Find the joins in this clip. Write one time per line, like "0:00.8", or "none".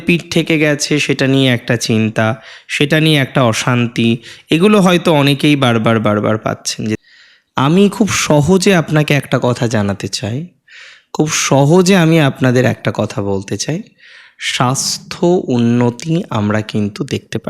0:07.0